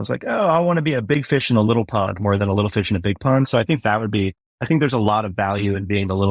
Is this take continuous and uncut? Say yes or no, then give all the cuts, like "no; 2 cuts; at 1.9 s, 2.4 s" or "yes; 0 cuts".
yes; 0 cuts